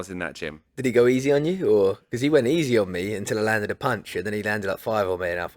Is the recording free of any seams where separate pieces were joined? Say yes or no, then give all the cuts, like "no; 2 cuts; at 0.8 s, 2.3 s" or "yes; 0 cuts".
yes; 0 cuts